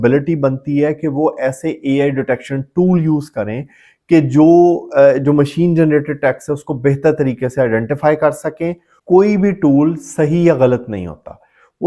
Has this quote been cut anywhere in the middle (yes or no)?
yes